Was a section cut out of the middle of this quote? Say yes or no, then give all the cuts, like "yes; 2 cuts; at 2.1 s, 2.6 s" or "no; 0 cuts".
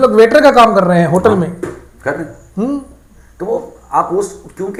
no; 0 cuts